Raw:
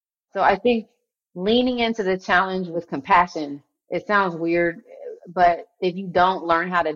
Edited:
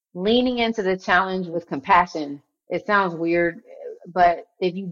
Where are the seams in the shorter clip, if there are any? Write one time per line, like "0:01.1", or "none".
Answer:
none